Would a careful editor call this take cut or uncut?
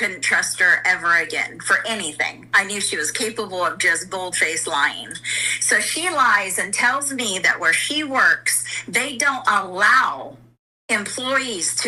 uncut